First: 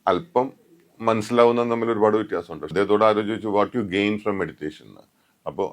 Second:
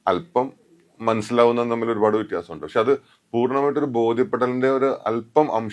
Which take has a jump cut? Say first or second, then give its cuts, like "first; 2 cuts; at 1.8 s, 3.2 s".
first; 1 cut; at 2.6 s